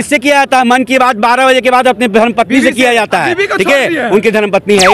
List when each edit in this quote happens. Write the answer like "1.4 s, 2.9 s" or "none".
none